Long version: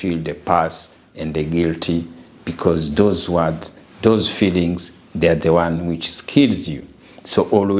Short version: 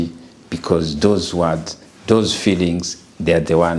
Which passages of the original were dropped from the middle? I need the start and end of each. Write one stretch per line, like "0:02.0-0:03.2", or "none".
none